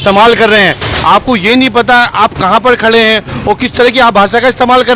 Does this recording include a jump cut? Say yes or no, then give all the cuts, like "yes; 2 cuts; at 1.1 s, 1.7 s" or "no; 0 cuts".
no; 0 cuts